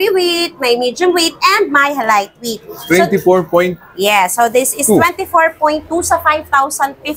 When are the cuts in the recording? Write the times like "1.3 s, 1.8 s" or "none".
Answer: none